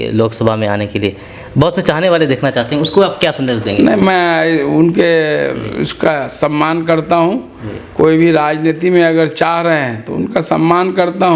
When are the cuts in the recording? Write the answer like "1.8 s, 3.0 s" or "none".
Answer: none